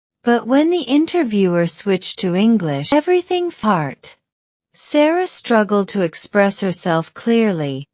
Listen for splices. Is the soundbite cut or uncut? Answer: cut